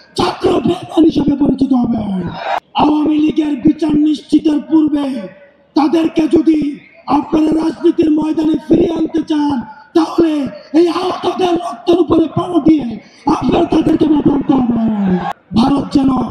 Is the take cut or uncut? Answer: cut